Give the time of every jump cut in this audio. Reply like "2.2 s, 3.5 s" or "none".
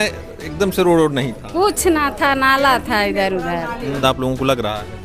4.0 s